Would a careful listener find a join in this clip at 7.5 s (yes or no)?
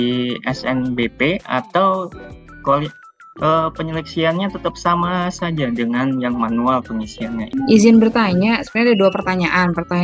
yes